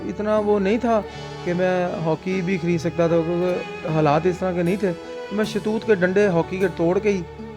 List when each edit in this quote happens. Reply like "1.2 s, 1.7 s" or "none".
none